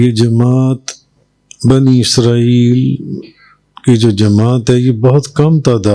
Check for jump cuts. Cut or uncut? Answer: uncut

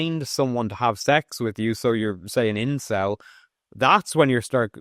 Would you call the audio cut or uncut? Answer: uncut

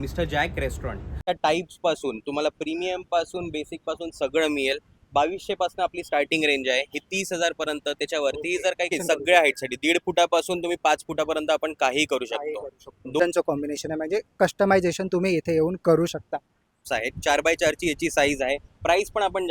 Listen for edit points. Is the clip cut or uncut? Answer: cut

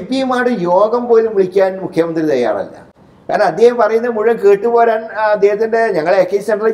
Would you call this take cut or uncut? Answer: uncut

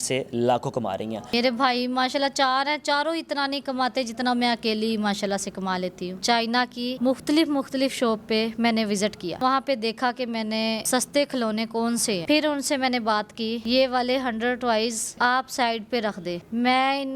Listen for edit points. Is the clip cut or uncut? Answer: cut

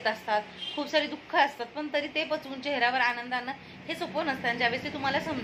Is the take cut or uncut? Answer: uncut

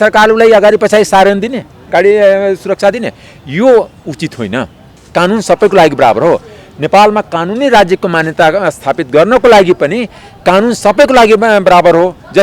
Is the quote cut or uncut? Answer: uncut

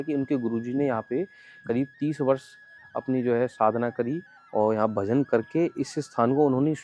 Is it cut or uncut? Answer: uncut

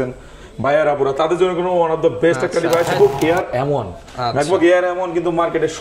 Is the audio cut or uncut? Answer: cut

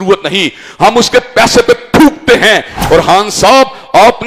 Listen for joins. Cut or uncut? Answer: cut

